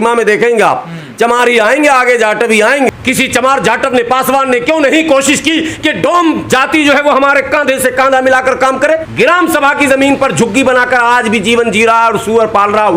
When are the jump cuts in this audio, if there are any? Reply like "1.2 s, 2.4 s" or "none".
2.9 s, 9.1 s